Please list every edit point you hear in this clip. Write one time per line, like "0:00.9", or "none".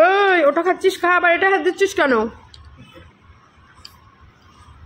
none